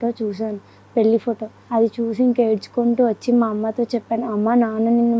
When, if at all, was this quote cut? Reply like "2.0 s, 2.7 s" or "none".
1.5 s